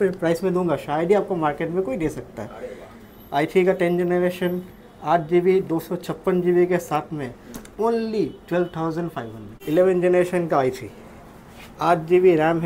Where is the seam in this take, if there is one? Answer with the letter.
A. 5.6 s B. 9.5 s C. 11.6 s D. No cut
B